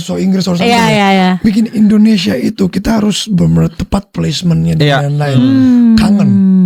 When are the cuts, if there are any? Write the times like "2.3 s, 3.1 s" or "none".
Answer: none